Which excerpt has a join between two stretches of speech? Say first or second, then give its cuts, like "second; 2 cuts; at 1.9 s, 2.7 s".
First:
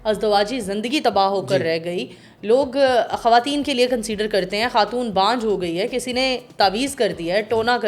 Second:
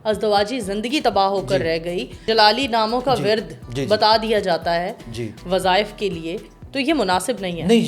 second; 1 cut; at 2.2 s